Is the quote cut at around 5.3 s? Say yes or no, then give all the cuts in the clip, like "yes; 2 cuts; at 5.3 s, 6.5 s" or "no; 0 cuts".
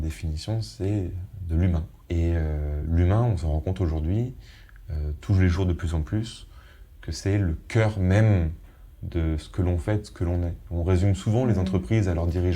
no; 2 cuts; at 1.9 s, 2.8 s